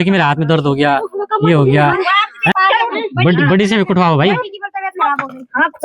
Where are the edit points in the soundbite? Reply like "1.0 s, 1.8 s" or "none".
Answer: 2.5 s